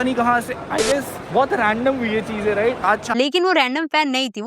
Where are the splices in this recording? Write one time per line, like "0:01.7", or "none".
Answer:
0:03.1